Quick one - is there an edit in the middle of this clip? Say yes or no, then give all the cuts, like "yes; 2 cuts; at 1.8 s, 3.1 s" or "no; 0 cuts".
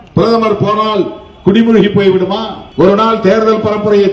yes; 1 cut; at 2.6 s